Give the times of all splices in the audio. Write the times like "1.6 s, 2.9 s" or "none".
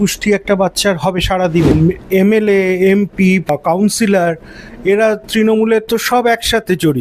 1.7 s, 3.5 s